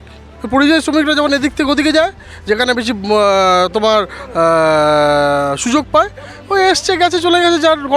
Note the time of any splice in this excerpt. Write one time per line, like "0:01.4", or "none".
none